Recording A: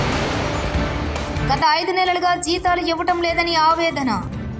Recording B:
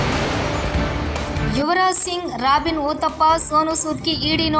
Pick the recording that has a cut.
B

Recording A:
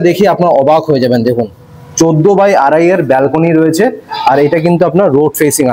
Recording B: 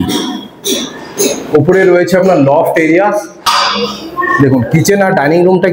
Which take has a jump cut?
B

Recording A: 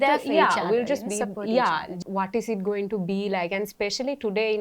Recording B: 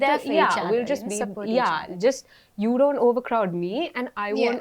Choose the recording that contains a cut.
A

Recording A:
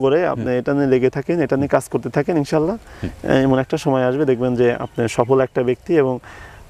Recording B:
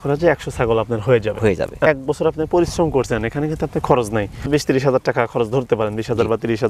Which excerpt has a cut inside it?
B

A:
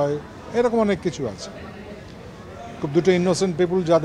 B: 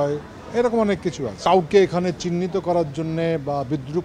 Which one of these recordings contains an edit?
B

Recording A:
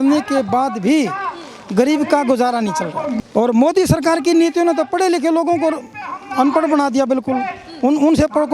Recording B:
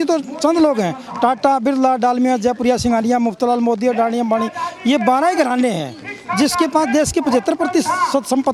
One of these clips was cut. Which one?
A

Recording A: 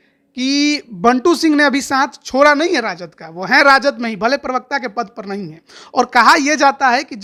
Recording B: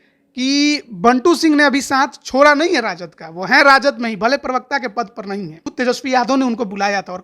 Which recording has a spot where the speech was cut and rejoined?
B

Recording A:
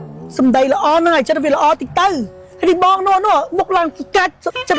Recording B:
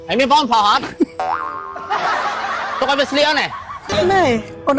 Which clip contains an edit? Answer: B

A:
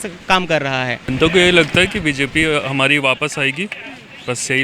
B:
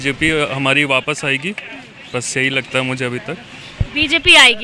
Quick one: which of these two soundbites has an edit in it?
A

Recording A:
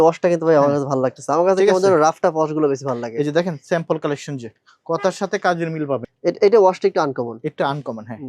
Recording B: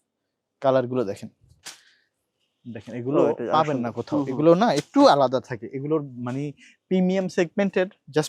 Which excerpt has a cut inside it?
A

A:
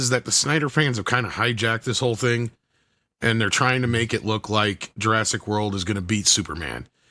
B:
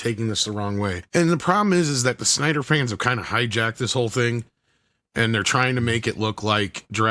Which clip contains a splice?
B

